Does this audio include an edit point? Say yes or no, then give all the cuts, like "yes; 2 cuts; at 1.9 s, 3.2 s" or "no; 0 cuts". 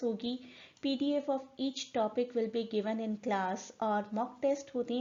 no; 0 cuts